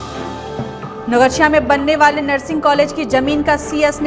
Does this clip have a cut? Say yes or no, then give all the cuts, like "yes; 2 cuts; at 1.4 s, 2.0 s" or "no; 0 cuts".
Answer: yes; 1 cut; at 0.9 s